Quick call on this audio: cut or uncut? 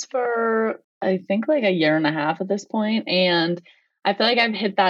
cut